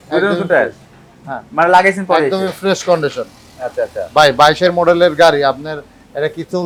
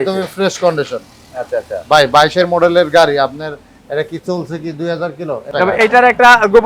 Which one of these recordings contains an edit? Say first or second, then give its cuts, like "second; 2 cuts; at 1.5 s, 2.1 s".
second; 1 cut; at 5.5 s